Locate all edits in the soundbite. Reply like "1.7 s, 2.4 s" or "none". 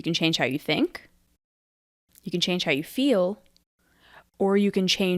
none